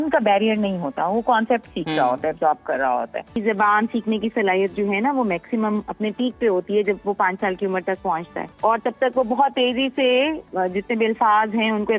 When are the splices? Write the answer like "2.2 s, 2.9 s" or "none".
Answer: 3.4 s, 8.4 s, 10.4 s